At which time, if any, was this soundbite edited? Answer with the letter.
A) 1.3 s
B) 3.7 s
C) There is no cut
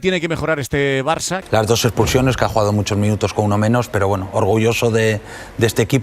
A